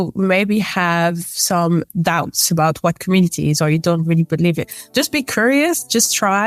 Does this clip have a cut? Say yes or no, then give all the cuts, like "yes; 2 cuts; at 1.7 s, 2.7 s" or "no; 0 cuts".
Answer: no; 0 cuts